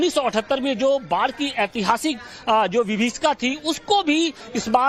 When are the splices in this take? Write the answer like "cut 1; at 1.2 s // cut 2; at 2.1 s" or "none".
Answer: cut 1; at 2.7 s